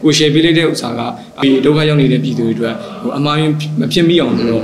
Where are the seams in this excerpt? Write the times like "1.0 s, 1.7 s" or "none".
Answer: 1.4 s

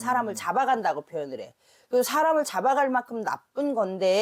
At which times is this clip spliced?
none

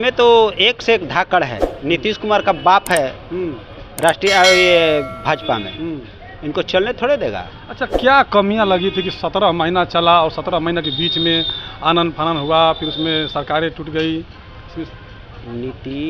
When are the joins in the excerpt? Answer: none

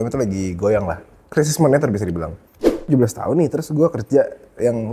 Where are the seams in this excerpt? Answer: 2.9 s

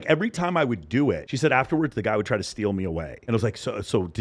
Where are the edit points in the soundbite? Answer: 1.3 s

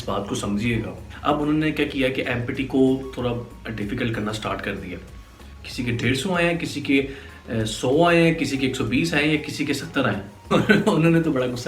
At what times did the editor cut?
1.0 s, 5.2 s, 10.5 s

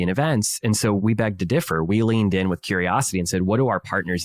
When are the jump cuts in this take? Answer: 1.0 s

